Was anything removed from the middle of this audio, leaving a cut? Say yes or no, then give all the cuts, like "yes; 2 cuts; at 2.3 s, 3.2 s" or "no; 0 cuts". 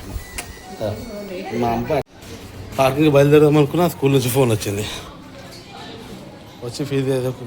yes; 1 cut; at 2.2 s